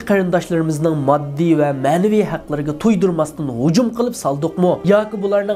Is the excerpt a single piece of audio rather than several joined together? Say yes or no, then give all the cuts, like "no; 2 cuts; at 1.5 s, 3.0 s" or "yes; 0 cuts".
yes; 0 cuts